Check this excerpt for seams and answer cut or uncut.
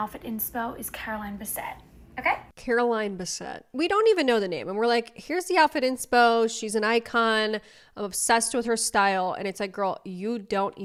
uncut